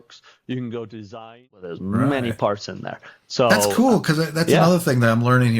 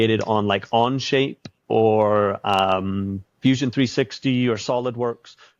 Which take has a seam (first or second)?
first